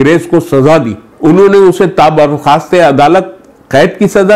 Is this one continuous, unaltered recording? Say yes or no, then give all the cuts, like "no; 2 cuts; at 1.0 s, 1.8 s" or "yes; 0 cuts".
no; 1 cut; at 1.0 s